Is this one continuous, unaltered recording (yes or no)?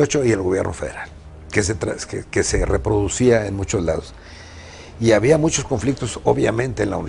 yes